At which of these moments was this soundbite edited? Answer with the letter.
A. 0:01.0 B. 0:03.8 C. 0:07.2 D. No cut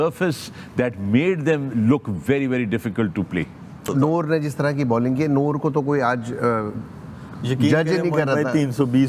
B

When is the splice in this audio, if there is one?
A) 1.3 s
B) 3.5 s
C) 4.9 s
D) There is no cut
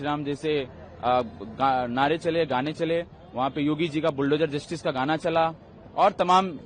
D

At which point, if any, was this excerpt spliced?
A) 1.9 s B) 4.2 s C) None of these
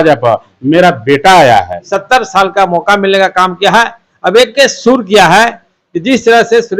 A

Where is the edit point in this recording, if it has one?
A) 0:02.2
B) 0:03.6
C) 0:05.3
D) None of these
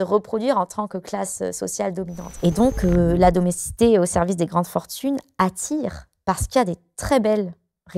A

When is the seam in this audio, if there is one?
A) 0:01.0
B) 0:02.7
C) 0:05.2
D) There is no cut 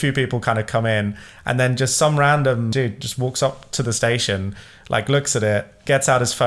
B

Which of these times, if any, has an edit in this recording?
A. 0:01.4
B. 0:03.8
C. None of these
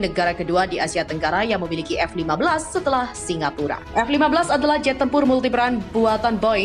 B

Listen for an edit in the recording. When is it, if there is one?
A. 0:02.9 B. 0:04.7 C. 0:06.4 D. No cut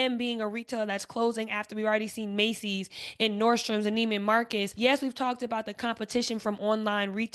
B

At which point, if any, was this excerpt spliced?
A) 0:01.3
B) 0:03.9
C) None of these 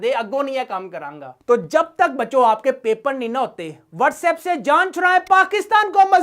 A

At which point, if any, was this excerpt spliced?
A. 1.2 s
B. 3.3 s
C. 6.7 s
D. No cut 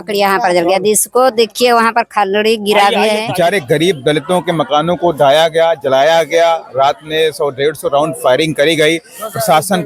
B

